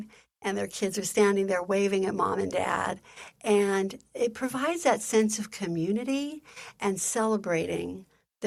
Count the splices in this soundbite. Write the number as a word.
zero